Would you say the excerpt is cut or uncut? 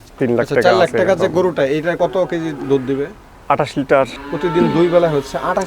cut